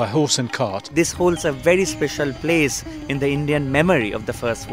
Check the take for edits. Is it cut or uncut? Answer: cut